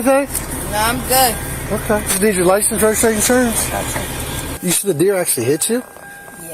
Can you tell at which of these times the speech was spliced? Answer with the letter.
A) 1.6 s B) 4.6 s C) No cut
B